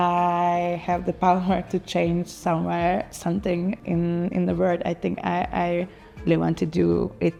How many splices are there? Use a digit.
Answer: 0